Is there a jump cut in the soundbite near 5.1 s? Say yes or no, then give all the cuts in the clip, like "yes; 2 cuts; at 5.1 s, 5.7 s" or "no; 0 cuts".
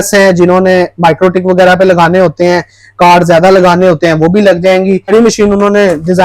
yes; 1 cut; at 5.1 s